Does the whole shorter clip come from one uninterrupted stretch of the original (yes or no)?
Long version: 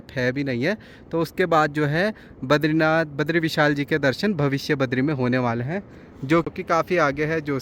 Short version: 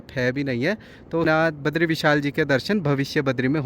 no